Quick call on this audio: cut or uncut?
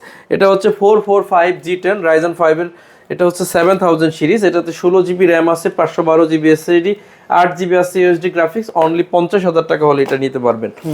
uncut